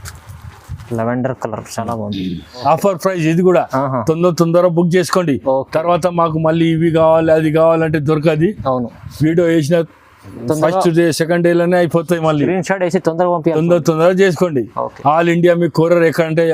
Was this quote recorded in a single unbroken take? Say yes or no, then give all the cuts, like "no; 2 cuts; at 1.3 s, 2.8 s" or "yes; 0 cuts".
no; 1 cut; at 2.6 s